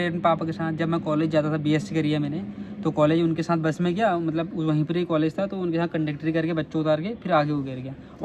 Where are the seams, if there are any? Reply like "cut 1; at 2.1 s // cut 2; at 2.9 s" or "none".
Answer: none

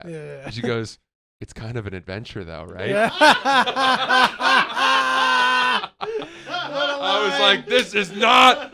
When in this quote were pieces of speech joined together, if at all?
none

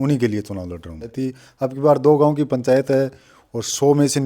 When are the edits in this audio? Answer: cut 1; at 1.1 s

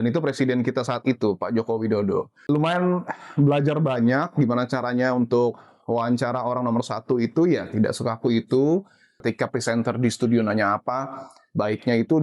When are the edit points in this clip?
cut 1; at 2.3 s // cut 2; at 9.1 s

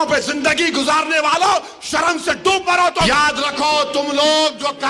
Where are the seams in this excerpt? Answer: cut 1; at 3.1 s

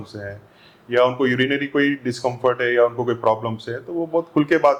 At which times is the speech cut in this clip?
none

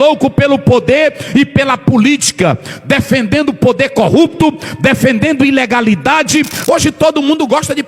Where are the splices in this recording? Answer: cut 1; at 6.5 s

